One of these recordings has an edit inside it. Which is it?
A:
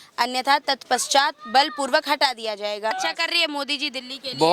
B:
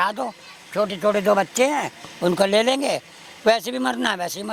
A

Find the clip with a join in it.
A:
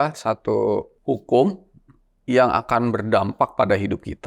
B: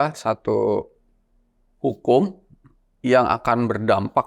A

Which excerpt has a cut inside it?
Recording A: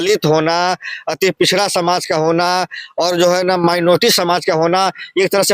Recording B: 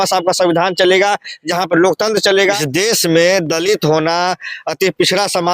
B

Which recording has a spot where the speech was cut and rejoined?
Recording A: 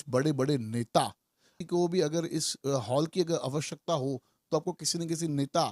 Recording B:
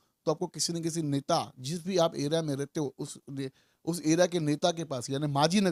A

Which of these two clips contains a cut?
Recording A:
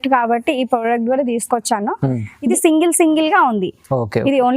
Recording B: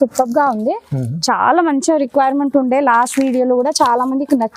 A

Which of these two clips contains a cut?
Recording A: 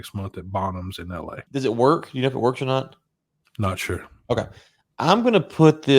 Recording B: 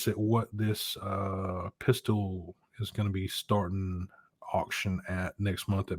A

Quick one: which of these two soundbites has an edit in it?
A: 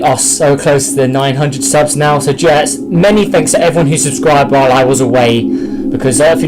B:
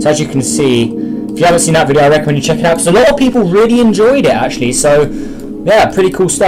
A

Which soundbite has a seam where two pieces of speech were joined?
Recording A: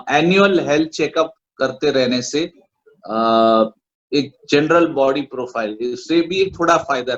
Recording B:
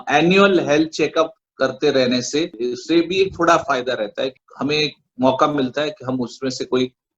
B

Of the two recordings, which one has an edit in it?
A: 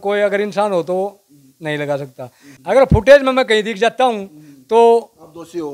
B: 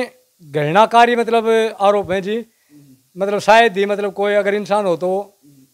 A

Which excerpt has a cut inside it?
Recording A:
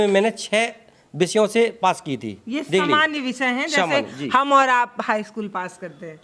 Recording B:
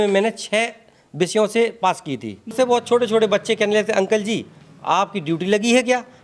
B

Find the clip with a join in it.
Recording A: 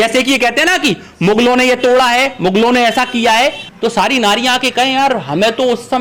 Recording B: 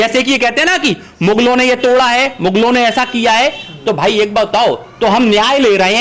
A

